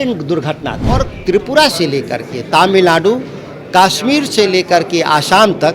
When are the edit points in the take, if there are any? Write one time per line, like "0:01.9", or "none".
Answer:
0:01.1